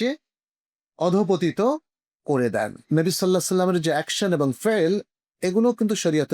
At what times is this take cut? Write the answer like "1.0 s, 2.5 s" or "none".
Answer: 2.8 s

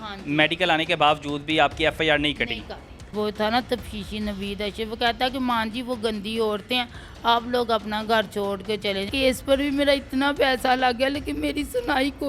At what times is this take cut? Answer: 3.1 s, 9.1 s

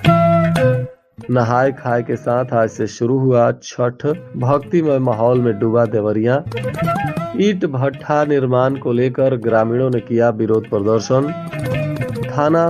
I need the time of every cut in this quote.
0.9 s

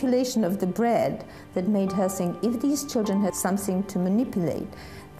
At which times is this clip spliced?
3.4 s

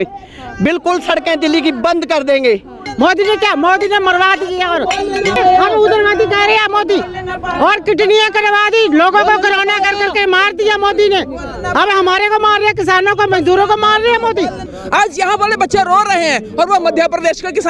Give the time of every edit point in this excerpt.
2.8 s, 5.4 s, 14.7 s

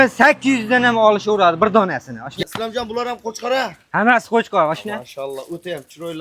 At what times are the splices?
2.4 s

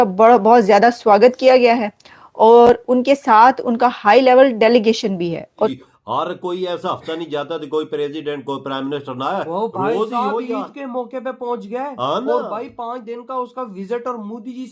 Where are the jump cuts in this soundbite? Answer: 5.8 s

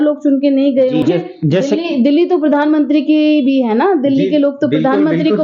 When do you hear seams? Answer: 1.0 s

